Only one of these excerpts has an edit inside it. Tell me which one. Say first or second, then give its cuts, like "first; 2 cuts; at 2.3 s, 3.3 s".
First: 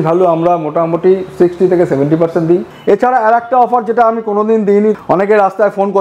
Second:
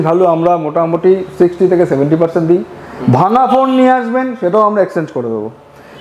first; 2 cuts; at 2.7 s, 4.9 s